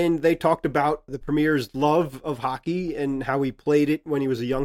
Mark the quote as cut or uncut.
uncut